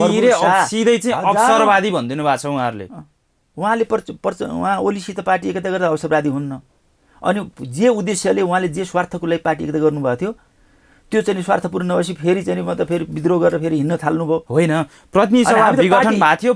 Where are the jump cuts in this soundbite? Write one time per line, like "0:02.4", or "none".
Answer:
none